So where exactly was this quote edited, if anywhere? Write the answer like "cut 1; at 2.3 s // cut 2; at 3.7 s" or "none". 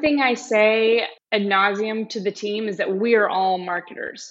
cut 1; at 1.2 s